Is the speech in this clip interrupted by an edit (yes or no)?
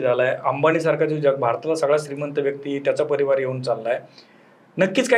no